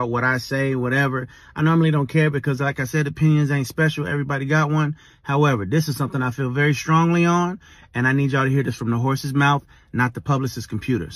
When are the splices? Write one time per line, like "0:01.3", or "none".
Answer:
none